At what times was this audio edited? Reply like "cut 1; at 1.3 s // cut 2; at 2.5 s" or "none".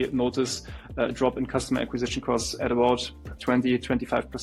none